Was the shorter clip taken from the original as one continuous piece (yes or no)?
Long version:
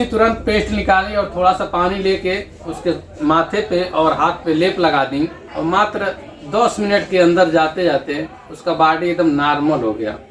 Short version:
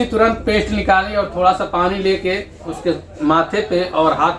yes